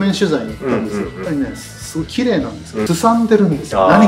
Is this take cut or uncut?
cut